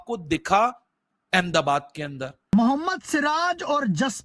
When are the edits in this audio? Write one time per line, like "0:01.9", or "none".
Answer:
0:02.5